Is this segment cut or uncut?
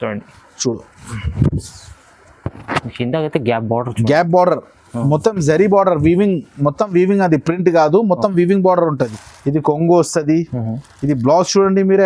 cut